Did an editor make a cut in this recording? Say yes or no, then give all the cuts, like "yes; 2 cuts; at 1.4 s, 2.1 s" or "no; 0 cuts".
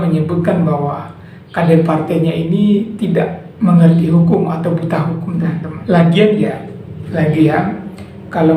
yes; 1 cut; at 5.7 s